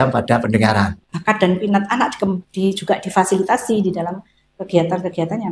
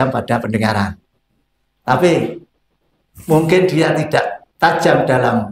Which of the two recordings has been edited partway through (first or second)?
first